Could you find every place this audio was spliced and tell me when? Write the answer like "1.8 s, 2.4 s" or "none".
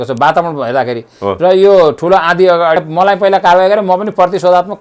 2.8 s